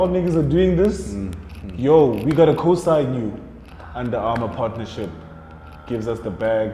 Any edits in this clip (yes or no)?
no